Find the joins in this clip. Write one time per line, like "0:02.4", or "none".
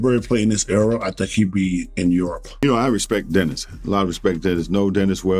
0:02.6

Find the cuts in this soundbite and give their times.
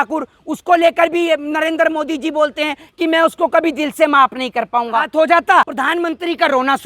0:05.1
0:05.7

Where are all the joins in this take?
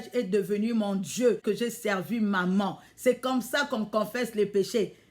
0:01.3

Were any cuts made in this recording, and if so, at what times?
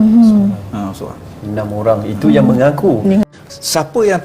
0:03.2

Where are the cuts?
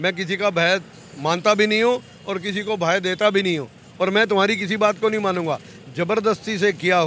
none

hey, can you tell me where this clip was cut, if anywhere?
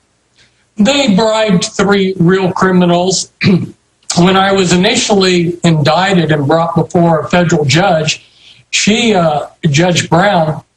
0:04.1

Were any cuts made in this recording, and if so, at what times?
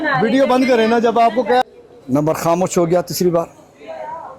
0:01.6

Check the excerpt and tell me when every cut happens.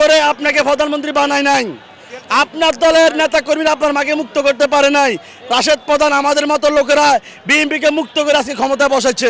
none

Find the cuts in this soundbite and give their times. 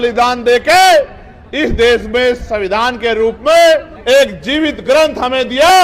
0:03.9

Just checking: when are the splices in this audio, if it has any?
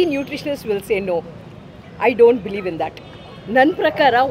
none

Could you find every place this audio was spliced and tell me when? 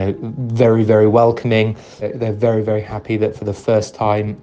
0:02.0

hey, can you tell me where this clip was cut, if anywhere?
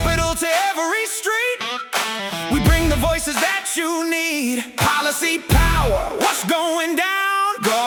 none

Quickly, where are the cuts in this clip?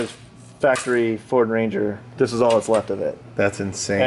none

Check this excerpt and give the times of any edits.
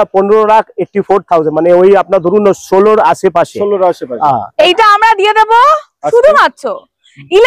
none

